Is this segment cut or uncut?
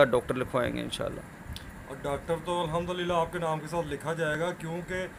uncut